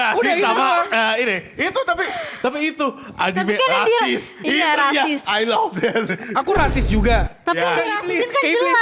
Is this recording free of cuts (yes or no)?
yes